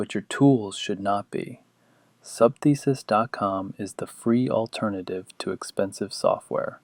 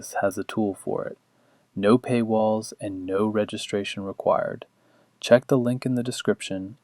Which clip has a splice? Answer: second; 1 cut; at 5.9 s

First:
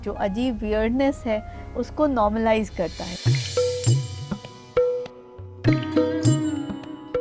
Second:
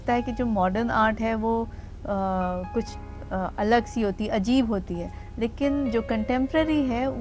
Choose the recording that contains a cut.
first; 1 cut; at 3.1 s

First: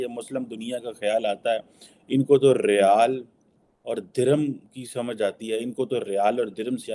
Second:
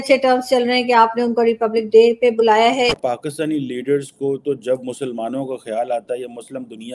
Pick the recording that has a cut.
second; 1 cut; at 3.0 s

